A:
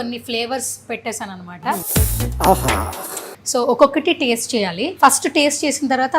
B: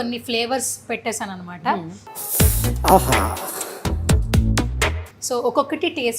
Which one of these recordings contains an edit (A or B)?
A